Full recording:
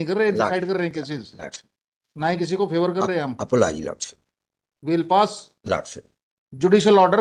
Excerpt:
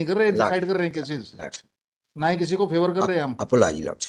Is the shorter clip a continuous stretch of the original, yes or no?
yes